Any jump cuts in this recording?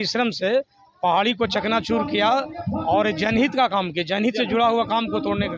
no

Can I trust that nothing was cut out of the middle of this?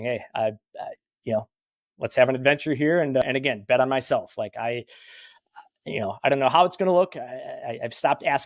no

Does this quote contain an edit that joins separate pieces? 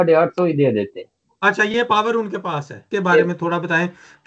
yes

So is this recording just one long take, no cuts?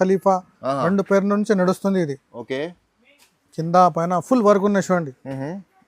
yes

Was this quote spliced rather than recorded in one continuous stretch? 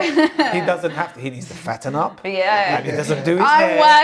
no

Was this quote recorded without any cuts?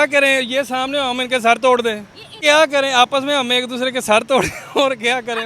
no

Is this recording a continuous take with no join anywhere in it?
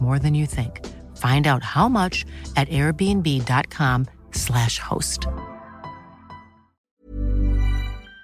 no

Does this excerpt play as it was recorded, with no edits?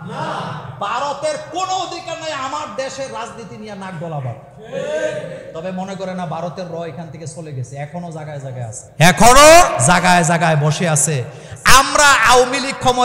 no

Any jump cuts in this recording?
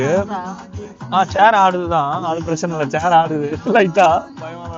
no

